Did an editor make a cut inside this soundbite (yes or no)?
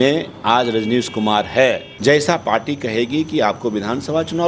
yes